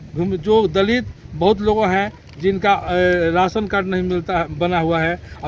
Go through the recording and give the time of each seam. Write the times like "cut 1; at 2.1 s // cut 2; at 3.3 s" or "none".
none